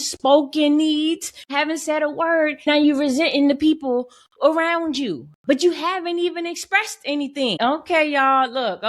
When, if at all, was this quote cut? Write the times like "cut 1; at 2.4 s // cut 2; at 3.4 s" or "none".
cut 1; at 1.5 s // cut 2; at 2.7 s // cut 3; at 7.6 s